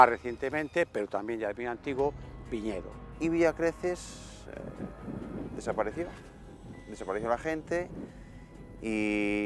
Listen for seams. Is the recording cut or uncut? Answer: cut